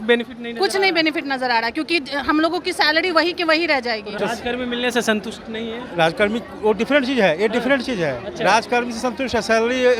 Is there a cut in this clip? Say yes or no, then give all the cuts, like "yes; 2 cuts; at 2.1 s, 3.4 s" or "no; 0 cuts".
yes; 1 cut; at 4.2 s